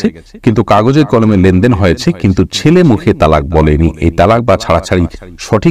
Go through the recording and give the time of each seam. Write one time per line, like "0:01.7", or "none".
none